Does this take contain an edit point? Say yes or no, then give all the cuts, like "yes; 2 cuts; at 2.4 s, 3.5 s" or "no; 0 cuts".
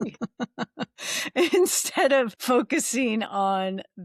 yes; 1 cut; at 2.4 s